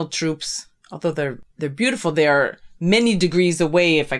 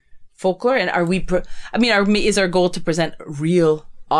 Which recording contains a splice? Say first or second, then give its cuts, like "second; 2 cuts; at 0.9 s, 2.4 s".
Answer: first; 1 cut; at 1.5 s